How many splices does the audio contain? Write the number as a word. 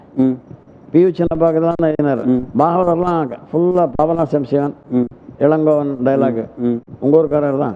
zero